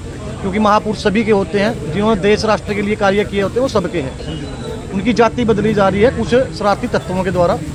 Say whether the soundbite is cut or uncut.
uncut